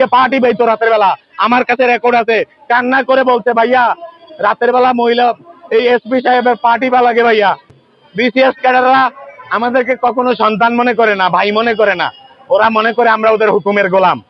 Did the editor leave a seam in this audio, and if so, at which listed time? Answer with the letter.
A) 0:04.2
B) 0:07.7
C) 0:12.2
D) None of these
B